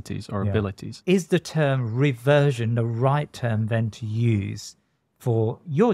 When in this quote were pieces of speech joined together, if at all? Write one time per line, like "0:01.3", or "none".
0:00.9